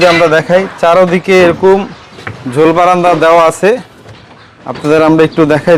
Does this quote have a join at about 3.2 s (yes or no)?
no